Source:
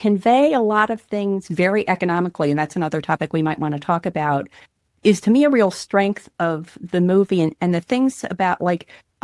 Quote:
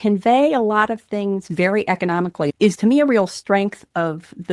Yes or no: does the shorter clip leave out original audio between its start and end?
yes